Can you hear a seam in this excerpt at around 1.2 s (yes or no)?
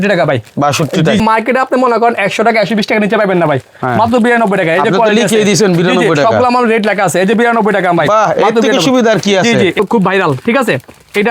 yes